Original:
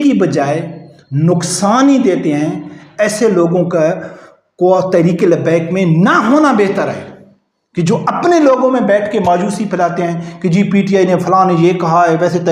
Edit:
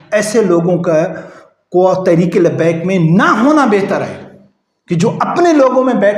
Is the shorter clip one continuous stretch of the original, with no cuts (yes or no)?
yes